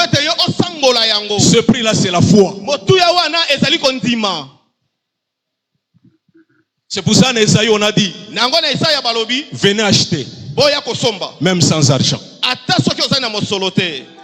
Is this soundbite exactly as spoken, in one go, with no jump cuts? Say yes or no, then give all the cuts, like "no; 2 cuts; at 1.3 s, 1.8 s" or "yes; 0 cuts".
yes; 0 cuts